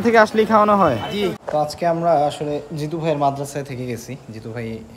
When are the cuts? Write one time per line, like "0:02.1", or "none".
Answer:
0:01.4

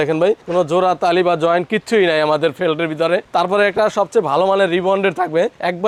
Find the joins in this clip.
none

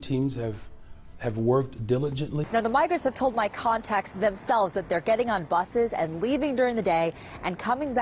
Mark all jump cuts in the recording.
0:02.4

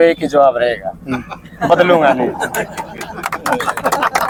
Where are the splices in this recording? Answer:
none

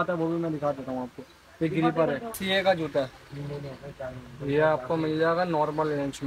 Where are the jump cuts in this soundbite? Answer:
0:02.4

